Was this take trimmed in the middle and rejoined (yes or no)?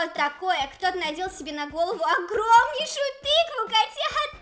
no